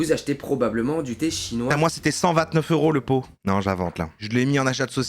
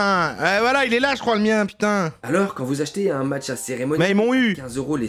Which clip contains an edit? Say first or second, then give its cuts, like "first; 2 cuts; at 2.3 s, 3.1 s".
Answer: first; 1 cut; at 3.8 s